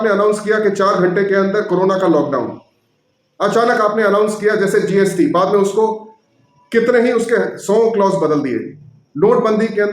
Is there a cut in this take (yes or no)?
no